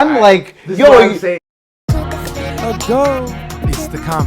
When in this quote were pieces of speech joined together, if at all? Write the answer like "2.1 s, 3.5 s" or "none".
1.5 s